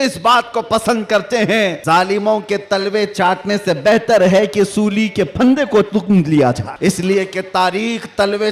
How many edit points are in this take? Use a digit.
2